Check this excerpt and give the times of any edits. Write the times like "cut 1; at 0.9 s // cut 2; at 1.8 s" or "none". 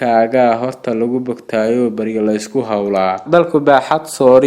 cut 1; at 3.2 s